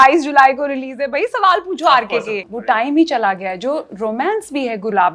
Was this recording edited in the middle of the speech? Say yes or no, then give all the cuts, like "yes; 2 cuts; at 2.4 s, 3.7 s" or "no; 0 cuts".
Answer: yes; 1 cut; at 2.4 s